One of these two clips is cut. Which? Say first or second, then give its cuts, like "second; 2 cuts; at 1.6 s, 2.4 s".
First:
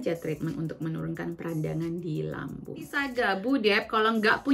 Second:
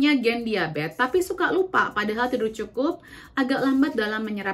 first; 1 cut; at 3.0 s